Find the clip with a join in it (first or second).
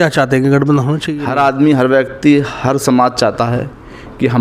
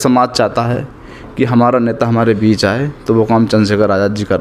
first